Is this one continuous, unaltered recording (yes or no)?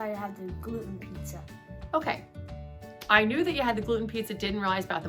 yes